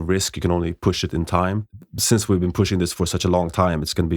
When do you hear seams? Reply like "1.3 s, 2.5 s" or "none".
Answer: 1.7 s